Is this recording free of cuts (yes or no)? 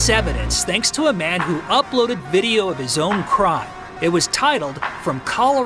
yes